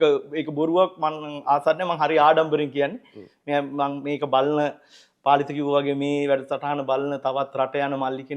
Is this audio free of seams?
yes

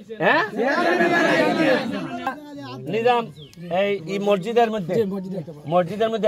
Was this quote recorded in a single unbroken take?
no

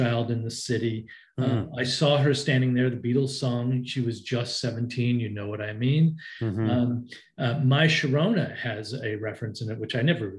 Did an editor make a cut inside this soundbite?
no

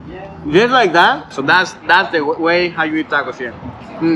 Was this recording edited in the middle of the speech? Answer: yes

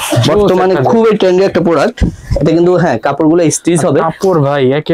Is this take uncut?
yes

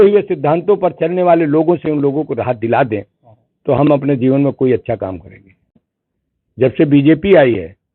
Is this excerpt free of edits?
no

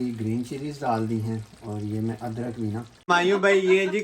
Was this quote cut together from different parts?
yes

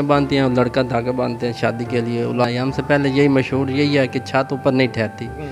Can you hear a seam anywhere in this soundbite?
yes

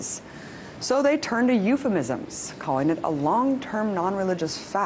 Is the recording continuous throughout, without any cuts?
no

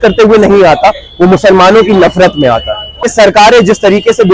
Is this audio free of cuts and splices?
no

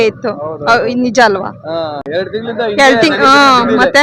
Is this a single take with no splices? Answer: yes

